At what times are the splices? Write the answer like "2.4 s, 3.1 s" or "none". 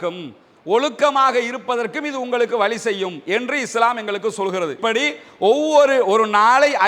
4.8 s

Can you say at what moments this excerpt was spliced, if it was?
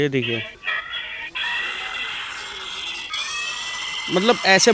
none

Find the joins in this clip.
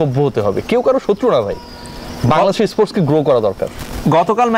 none

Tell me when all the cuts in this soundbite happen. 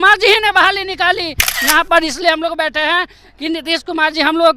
1.5 s

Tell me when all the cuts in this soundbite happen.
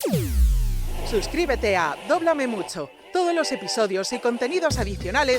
1.1 s

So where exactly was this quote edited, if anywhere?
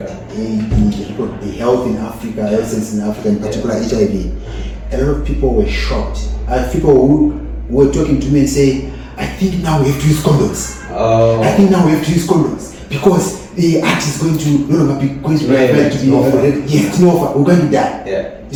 none

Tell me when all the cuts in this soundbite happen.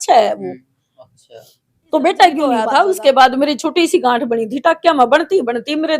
2.6 s

